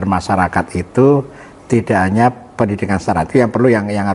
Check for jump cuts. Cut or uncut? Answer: uncut